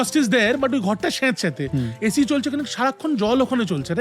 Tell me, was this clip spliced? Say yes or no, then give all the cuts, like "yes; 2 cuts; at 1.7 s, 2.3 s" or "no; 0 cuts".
no; 0 cuts